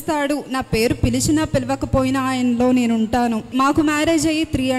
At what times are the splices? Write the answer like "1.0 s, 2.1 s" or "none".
3.5 s